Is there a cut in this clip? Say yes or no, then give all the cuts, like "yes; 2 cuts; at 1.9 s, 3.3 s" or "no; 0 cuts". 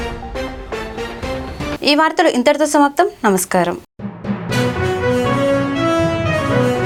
no; 0 cuts